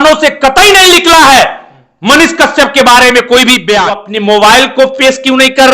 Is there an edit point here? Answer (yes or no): yes